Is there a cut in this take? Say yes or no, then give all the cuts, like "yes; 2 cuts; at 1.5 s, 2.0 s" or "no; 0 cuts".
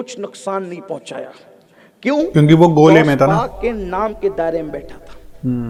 no; 0 cuts